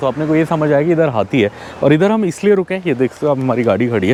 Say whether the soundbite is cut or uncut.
uncut